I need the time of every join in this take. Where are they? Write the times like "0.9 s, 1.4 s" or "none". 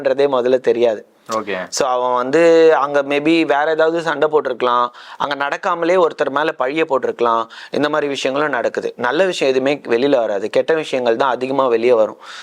none